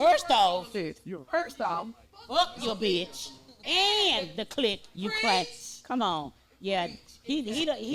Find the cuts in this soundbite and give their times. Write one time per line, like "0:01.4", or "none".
none